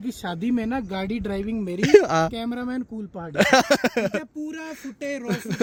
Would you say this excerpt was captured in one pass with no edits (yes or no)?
yes